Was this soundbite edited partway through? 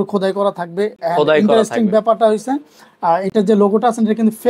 no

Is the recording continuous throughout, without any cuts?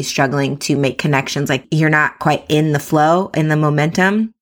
no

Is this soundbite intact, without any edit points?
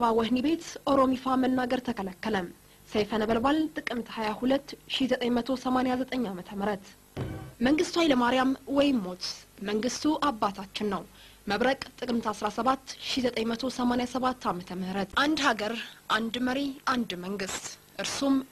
no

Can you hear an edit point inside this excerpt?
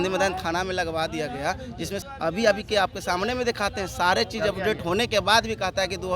yes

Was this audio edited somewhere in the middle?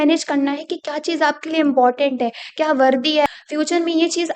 yes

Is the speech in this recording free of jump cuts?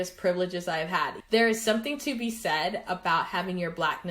no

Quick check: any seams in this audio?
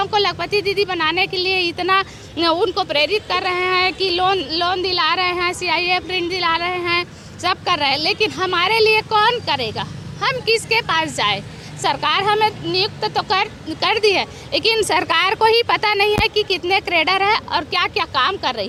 no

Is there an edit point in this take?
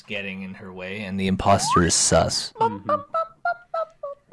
yes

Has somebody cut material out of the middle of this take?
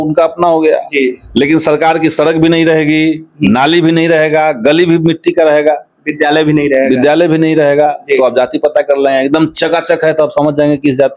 no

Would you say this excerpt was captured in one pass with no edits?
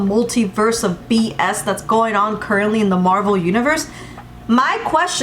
yes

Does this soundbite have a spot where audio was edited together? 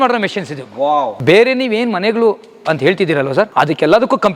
yes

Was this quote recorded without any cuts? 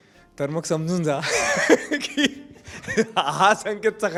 yes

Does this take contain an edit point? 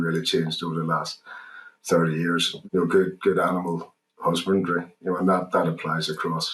yes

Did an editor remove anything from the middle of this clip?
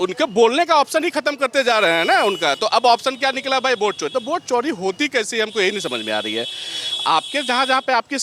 no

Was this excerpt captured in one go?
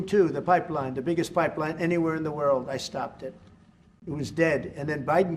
yes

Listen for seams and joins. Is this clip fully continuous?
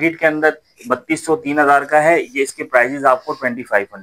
yes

